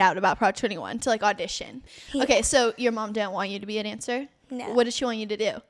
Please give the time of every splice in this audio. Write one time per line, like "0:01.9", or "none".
0:01.7